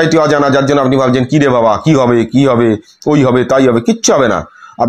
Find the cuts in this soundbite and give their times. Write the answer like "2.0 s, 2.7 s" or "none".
none